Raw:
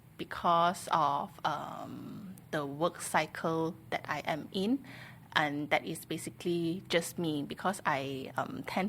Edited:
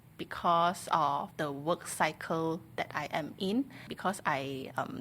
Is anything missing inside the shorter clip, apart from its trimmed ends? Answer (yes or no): yes